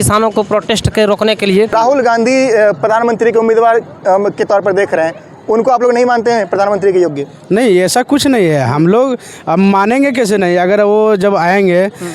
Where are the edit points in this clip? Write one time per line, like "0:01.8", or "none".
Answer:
0:01.7

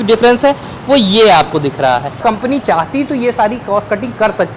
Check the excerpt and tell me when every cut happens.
0:02.2

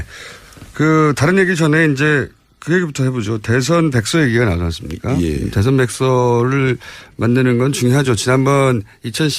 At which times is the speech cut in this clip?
0:03.4

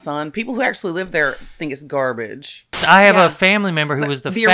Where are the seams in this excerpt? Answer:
0:02.8

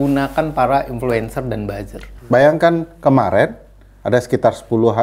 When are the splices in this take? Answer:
0:02.1

